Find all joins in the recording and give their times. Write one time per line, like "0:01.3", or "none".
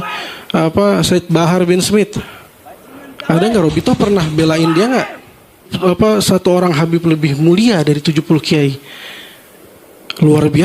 0:05.7